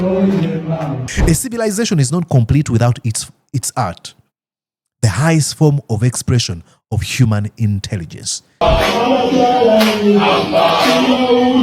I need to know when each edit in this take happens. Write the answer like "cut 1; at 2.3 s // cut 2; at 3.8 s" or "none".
cut 1; at 1.0 s // cut 2; at 8.6 s